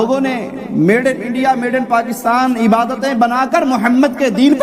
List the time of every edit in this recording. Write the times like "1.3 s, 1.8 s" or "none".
none